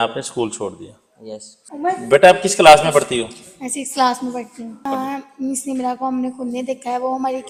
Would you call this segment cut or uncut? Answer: uncut